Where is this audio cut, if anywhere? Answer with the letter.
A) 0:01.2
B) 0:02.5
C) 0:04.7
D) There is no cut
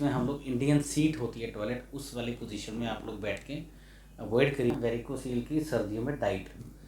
C